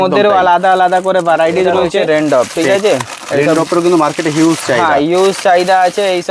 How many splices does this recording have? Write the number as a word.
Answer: one